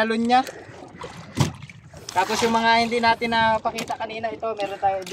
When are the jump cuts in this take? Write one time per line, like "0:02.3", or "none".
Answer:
none

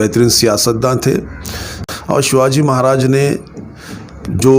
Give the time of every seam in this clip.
0:01.7

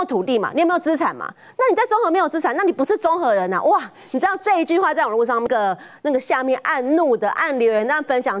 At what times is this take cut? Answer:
0:05.5

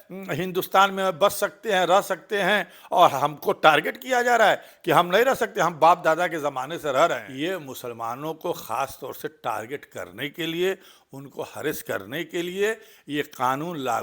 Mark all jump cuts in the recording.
0:07.3

